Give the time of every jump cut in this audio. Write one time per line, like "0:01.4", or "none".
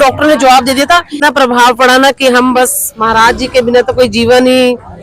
0:01.2